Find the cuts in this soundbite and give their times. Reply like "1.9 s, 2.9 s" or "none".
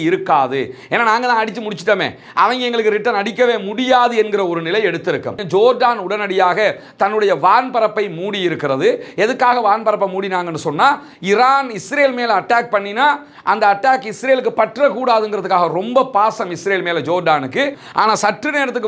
5.4 s, 17.8 s